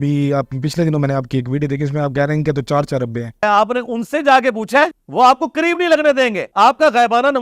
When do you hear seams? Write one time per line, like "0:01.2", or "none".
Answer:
0:03.4
0:05.0
0:06.4